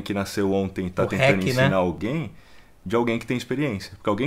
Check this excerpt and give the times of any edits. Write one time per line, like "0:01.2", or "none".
0:02.0